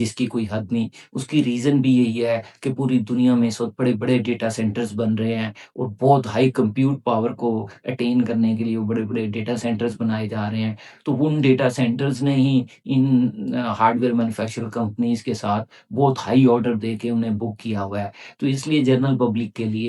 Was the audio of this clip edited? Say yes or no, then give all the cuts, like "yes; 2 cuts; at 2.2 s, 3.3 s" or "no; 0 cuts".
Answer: no; 0 cuts